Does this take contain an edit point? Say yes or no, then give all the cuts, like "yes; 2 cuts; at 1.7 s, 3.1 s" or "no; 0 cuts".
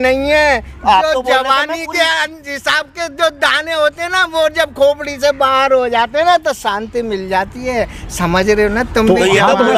no; 0 cuts